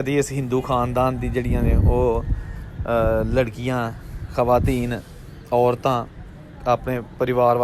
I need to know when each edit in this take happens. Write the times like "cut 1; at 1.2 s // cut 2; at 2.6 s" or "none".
none